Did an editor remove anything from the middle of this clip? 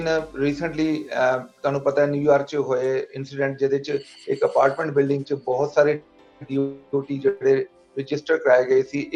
no; 0 cuts

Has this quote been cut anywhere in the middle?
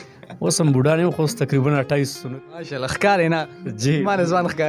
yes; 1 cut; at 2.3 s

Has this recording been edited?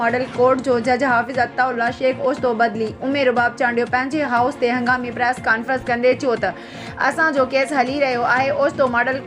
no; 0 cuts

